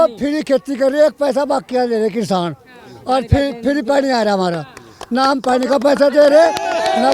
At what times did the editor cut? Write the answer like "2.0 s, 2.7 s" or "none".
none